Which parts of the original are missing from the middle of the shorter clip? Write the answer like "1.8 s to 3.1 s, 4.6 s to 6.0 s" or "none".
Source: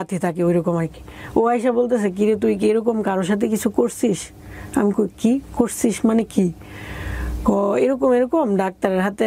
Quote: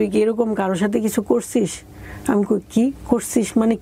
none